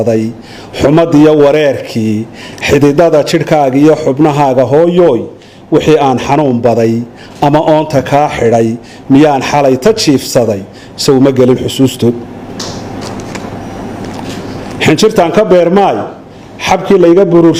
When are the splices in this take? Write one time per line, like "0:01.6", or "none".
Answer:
none